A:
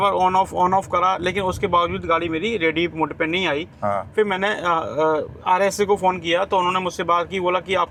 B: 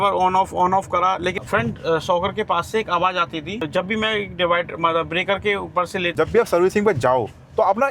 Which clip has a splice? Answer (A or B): B